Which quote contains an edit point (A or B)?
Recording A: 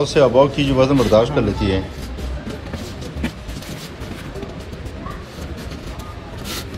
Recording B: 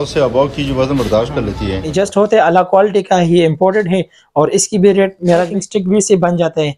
B